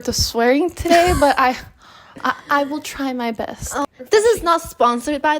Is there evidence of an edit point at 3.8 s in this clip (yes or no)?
yes